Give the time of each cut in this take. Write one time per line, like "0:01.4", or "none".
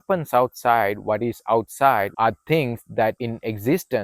0:02.1
0:03.2

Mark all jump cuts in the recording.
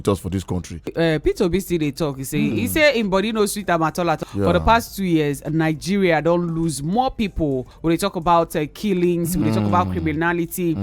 0:00.9
0:04.2
0:07.7

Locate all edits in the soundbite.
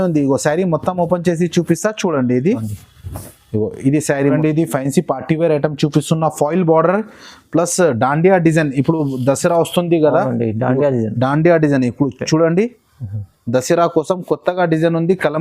0:04.4

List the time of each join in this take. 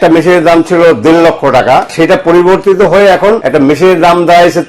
0:01.9
0:03.4

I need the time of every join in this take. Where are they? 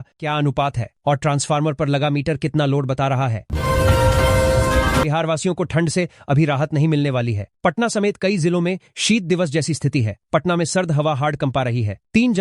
0:03.4
0:05.0

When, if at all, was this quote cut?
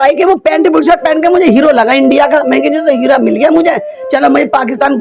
none

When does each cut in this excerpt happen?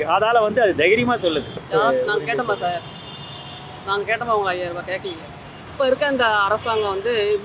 0:01.6
0:05.6

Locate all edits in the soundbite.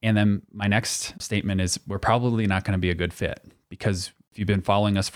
0:01.2
0:04.2

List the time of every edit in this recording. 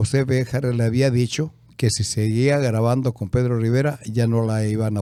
none

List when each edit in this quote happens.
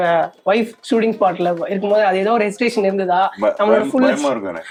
none

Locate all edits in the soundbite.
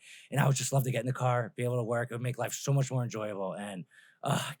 none

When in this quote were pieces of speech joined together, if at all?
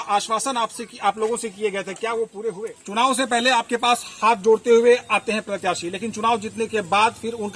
0:02.7

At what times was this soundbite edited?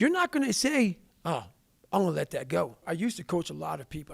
0:02.8

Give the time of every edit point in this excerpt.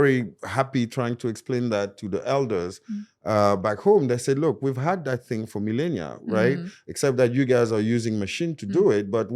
none

